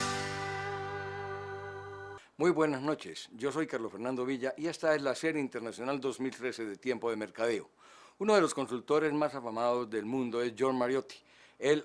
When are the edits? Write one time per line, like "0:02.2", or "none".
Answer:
0:02.1